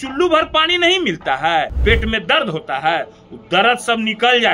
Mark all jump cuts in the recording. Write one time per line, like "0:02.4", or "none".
0:01.7